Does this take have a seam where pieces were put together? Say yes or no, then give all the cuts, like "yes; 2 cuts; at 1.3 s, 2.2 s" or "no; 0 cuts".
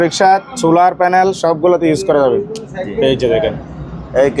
no; 0 cuts